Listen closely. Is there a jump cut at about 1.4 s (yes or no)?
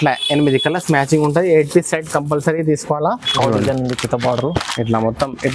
no